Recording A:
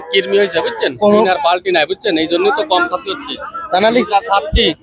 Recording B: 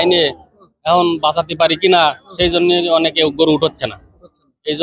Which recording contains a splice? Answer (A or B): A